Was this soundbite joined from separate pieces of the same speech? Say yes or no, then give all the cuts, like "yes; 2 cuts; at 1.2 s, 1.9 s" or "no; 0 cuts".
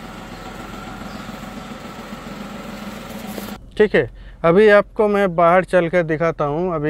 yes; 1 cut; at 3.6 s